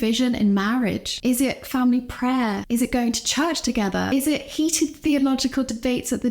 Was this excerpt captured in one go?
no; 3 cuts; at 1.1 s, 2.6 s, 4.1 s

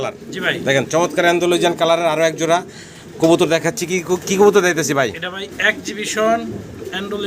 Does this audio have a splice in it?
no; 0 cuts

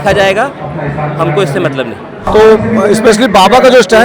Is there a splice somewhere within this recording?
yes; 1 cut; at 2.1 s

